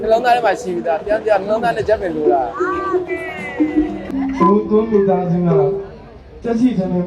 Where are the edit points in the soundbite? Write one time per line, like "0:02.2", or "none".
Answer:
0:04.1